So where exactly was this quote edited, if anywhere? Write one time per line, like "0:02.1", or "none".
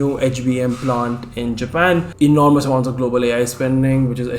0:02.1